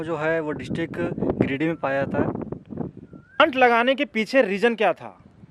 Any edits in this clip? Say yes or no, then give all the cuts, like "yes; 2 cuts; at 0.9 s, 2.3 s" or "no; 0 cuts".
yes; 1 cut; at 3.4 s